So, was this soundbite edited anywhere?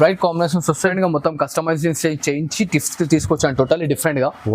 yes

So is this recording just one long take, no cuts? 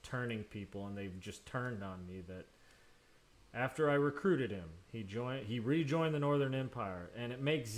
no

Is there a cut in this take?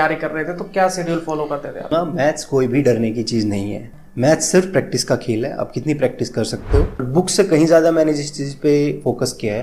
yes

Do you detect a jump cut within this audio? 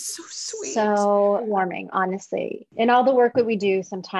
yes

